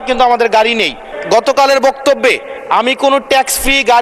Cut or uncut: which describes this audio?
cut